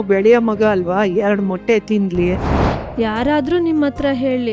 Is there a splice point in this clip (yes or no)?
yes